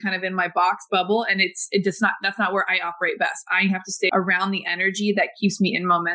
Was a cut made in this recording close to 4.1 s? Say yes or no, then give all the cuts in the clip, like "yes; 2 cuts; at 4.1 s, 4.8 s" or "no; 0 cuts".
yes; 1 cut; at 4.1 s